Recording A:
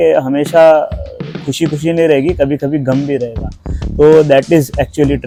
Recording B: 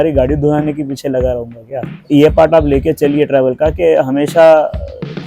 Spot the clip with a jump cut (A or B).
B